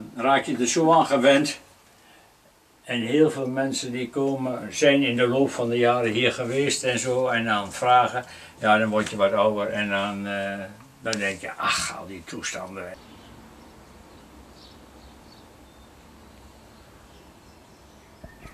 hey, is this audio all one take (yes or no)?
yes